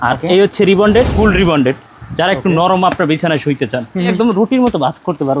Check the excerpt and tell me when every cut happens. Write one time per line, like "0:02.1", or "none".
0:01.1
0:04.1